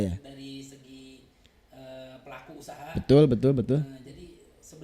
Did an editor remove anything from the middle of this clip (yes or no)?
no